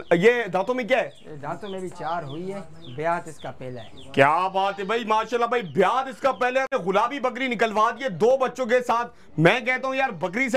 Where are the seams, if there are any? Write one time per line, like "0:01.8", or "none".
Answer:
0:06.7